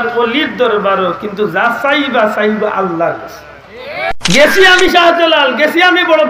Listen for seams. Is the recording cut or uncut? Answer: cut